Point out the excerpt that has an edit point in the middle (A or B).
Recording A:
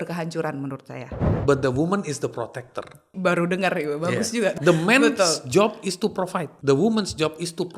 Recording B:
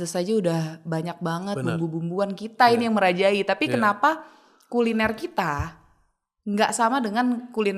A